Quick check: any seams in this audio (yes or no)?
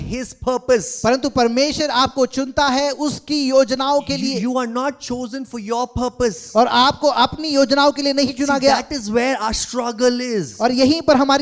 no